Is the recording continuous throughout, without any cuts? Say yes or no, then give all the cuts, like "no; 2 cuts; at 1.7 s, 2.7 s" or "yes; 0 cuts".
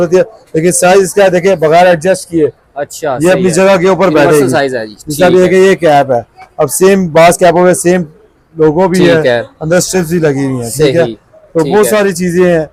yes; 0 cuts